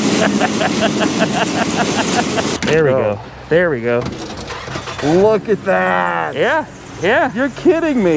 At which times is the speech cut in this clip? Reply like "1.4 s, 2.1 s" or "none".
2.6 s